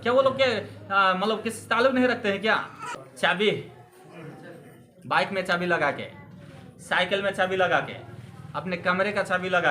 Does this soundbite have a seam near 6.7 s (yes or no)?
no